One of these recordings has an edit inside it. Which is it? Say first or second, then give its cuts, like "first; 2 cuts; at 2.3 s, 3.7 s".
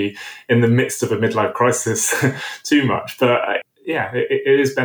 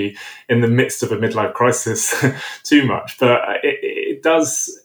first; 1 cut; at 3.6 s